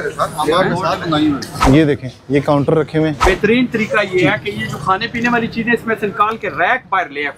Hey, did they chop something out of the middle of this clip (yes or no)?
yes